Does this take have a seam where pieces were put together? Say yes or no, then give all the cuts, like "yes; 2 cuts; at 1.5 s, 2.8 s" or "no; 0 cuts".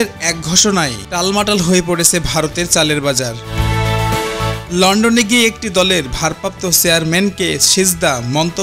no; 0 cuts